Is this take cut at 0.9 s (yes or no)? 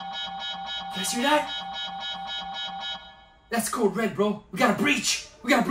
yes